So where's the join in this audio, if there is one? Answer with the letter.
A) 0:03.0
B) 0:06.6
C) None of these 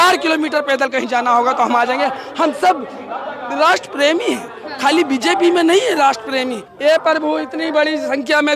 B